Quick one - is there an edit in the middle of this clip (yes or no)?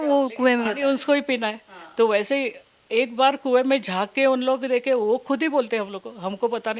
no